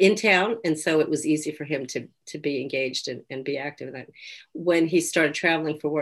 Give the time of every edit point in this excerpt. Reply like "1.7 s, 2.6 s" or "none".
none